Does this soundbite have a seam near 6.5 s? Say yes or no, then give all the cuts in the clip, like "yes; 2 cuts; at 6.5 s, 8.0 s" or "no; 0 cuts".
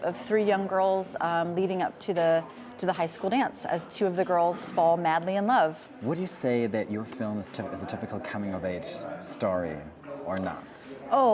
no; 1 cut; at 8.3 s